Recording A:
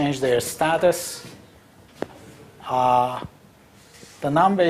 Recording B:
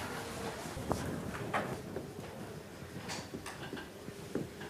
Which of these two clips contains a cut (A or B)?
A